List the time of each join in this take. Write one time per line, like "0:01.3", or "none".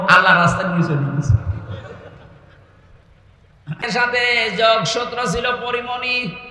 0:03.9